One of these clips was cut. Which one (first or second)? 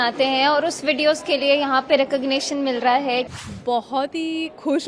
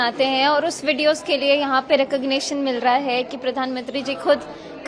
first